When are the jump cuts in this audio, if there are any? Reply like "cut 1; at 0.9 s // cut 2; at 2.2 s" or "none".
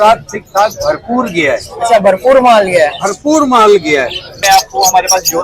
cut 1; at 4.4 s

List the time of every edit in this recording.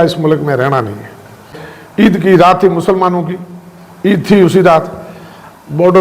cut 1; at 1.5 s

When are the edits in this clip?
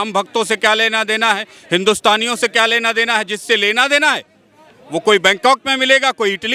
none

